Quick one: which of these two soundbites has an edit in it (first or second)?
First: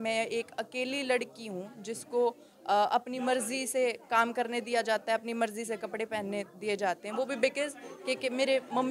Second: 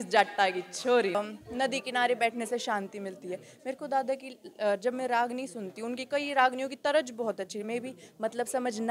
second